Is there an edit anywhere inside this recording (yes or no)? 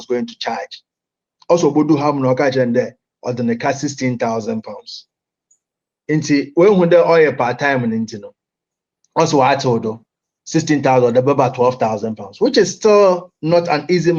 no